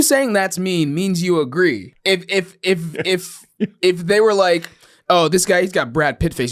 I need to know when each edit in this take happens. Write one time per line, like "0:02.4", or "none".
0:01.9